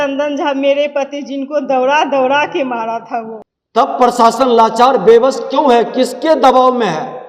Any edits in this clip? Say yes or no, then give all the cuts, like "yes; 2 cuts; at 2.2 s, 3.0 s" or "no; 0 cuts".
yes; 1 cut; at 3.4 s